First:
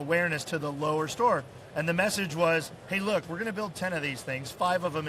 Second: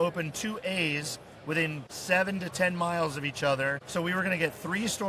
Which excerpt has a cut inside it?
second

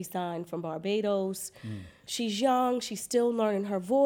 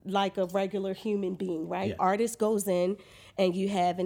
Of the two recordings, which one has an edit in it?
second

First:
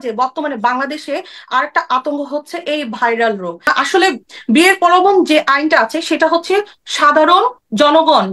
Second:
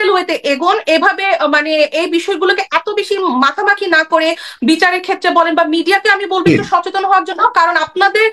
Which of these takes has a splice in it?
first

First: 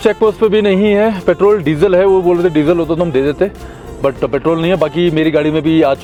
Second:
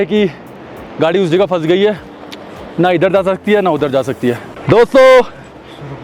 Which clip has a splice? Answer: second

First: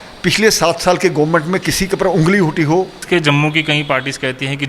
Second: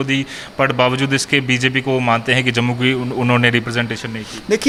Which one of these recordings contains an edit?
first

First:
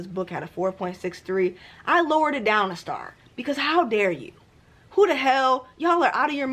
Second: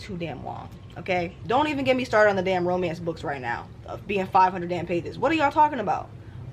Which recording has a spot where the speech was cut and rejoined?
second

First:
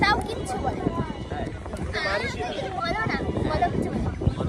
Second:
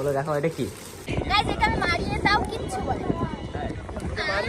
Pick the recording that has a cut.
second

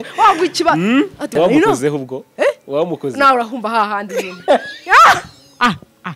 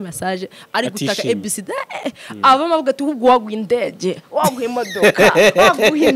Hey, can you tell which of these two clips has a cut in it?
first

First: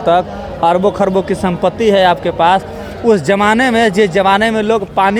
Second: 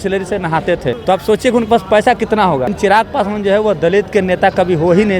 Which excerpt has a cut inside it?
second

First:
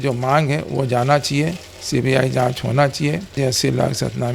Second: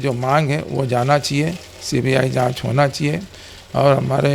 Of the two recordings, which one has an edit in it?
first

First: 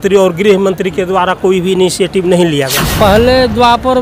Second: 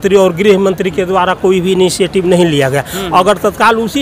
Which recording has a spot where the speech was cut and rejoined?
first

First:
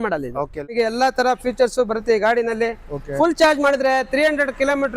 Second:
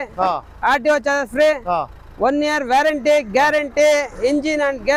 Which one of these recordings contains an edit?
first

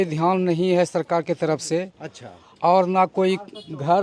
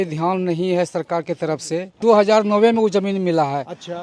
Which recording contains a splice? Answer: second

